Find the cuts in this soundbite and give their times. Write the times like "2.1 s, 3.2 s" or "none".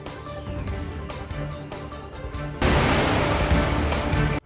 none